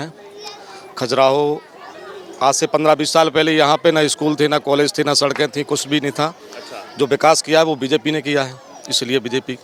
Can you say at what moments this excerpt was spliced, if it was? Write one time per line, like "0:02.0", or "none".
none